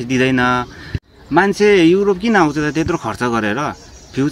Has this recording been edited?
yes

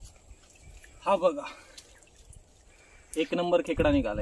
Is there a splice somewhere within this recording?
no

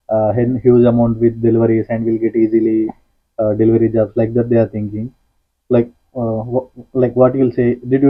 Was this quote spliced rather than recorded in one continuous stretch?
no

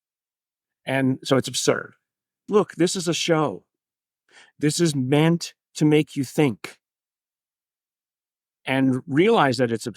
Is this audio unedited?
no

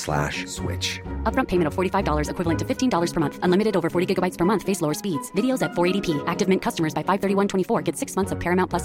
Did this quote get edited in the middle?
no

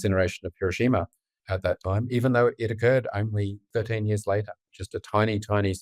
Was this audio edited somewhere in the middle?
yes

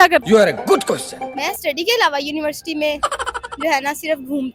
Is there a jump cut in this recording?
no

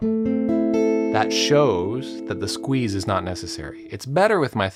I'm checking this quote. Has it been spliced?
no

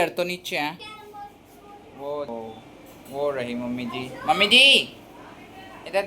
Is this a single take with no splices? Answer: no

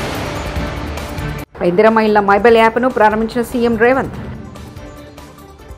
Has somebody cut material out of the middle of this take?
yes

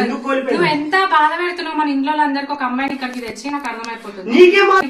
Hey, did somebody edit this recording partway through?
no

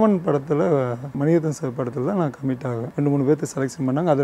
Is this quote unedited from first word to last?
no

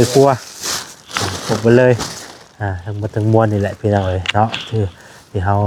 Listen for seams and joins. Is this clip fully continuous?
yes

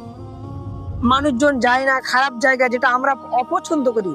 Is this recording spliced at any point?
no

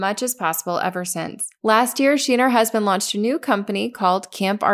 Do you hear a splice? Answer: yes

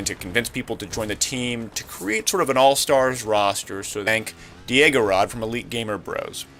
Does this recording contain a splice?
no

